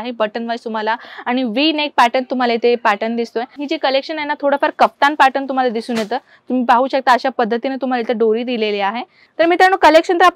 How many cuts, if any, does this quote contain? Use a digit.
2